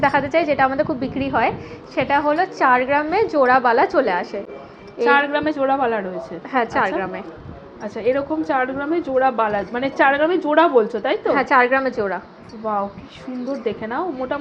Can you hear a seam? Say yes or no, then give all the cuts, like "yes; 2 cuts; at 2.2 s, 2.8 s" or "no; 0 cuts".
no; 0 cuts